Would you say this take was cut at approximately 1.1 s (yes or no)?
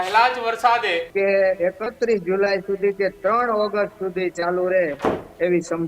yes